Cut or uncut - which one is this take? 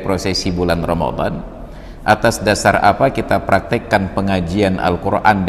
uncut